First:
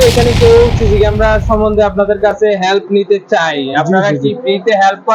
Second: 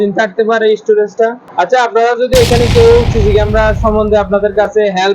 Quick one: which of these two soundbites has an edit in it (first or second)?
second